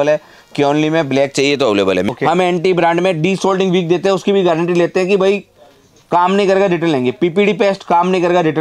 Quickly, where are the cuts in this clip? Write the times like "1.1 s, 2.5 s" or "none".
2.1 s